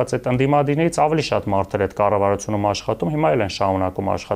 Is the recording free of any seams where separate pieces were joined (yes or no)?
yes